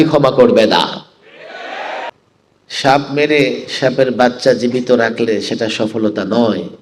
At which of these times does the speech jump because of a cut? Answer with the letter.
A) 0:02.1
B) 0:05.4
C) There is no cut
A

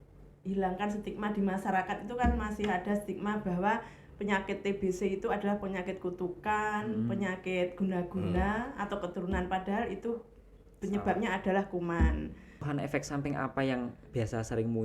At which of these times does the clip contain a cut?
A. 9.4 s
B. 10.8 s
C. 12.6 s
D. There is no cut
C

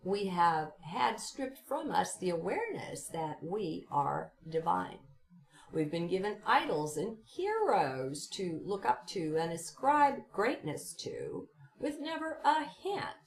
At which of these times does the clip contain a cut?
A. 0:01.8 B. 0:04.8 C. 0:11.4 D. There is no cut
D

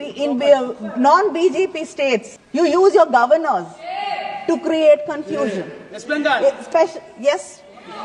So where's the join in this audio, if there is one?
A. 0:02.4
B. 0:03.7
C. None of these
A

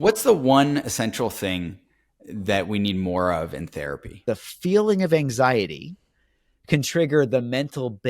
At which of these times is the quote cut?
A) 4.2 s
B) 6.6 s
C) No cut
A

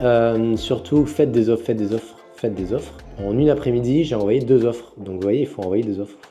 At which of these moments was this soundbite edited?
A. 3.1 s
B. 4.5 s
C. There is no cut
A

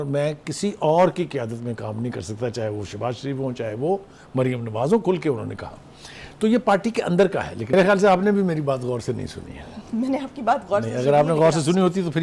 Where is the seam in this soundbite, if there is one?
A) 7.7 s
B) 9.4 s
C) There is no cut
A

